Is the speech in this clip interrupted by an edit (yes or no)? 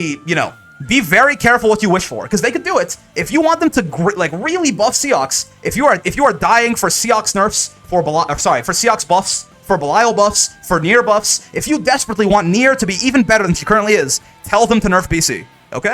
no